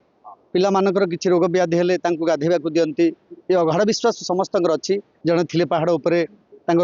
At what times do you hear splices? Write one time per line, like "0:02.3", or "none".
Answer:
0:05.1